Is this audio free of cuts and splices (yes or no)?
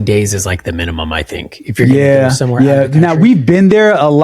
yes